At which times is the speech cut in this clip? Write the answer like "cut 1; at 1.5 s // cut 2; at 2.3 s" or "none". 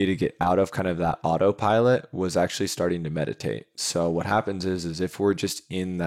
none

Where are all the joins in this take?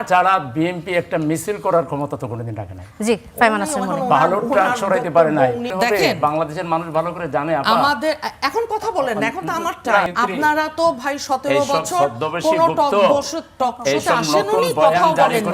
cut 1; at 5.7 s // cut 2; at 10.1 s

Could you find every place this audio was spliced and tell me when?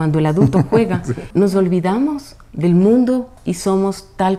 cut 1; at 1.2 s

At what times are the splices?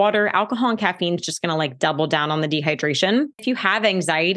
cut 1; at 3.4 s

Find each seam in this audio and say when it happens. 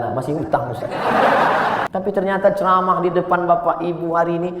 cut 1; at 1.9 s

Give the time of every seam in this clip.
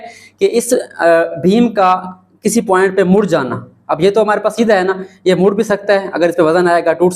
none

